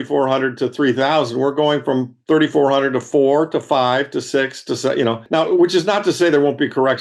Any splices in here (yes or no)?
no